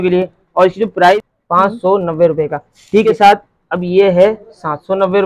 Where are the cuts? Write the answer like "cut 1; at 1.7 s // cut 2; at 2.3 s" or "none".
cut 1; at 1.3 s // cut 2; at 3.0 s